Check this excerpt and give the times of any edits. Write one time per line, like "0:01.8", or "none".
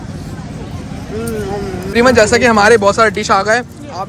0:01.9